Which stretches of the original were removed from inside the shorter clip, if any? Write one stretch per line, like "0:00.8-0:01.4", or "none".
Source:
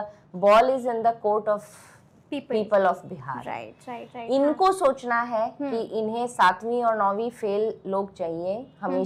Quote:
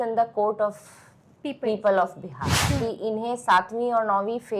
0:03.5-0:05.6